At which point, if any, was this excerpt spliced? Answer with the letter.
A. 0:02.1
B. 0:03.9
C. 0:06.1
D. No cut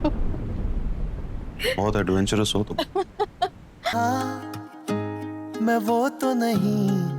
B